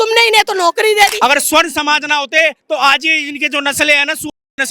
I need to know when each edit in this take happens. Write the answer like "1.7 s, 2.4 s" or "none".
1.1 s